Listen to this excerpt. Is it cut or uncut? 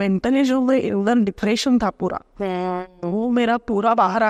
uncut